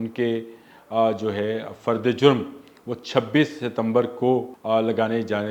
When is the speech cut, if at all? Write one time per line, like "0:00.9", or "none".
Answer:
0:04.5